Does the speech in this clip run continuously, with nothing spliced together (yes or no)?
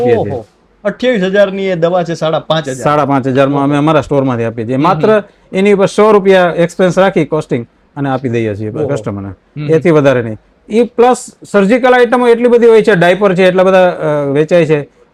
yes